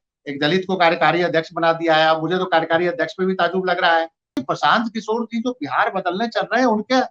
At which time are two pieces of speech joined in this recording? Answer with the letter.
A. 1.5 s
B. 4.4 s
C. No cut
B